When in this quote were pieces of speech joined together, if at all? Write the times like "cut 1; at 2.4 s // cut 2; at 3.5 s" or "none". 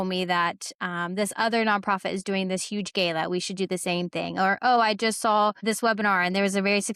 cut 1; at 5.6 s